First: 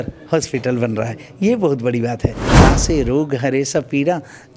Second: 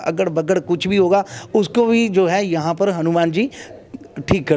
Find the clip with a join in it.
first; 1 cut; at 2.6 s

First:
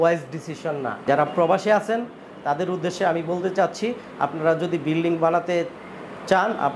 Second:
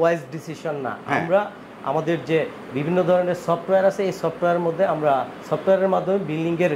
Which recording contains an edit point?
first; 1 cut; at 0.9 s

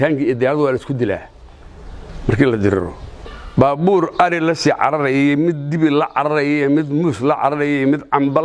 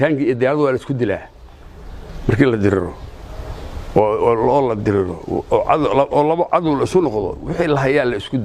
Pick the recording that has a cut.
first; 1 cut; at 3.4 s

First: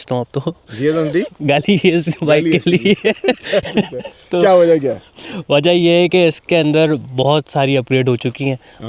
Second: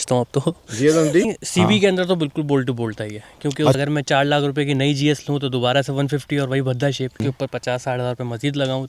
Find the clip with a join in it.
second; 3 cuts; at 1.3 s, 3.8 s, 7.2 s

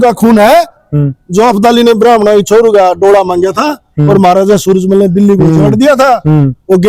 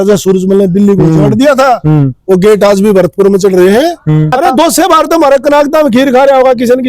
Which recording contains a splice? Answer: second; 1 cut; at 4.4 s

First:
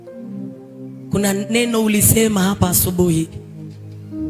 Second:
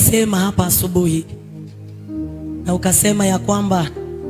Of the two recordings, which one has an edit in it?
first; 1 cut; at 1.1 s

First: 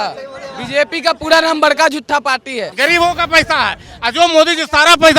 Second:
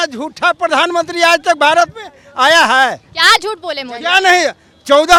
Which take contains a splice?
first; 1 cut; at 2.7 s

